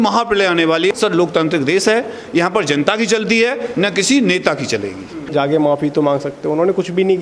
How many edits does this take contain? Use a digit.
2